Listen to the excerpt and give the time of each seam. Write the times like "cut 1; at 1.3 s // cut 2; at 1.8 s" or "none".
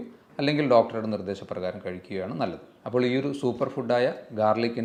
none